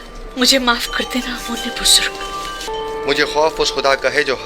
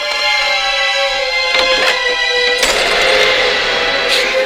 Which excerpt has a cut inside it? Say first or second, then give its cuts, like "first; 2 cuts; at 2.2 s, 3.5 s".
first; 1 cut; at 2.7 s